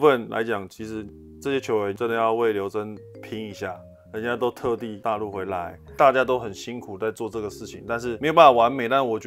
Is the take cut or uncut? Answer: cut